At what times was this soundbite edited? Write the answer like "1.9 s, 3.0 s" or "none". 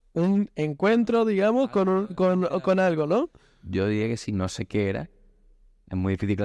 none